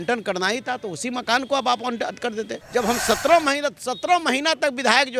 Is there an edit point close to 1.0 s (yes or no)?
no